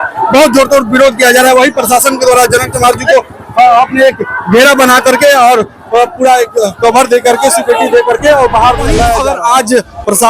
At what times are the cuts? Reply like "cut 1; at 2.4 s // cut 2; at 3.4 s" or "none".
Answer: cut 1; at 9.2 s